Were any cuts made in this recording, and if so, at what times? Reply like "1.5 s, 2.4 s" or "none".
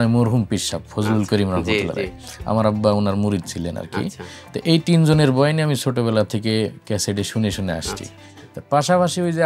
none